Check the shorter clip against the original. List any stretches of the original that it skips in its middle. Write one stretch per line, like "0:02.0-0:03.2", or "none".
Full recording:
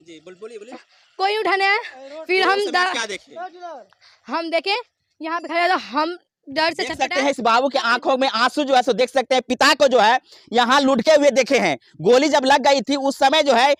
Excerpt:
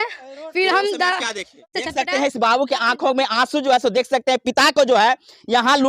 0:03.5-0:06.8